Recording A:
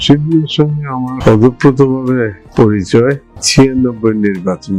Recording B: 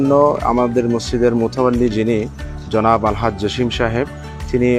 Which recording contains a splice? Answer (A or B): A